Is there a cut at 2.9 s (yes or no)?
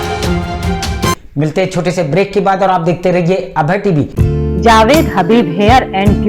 no